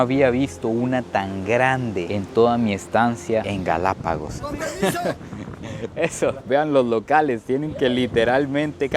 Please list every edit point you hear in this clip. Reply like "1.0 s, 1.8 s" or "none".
4.4 s